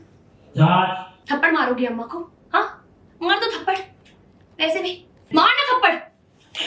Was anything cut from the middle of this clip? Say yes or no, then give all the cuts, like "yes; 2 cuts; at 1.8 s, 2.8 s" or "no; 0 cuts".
yes; 2 cuts; at 1.1 s, 5.1 s